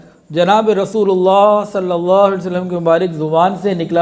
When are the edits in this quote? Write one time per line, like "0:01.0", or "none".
none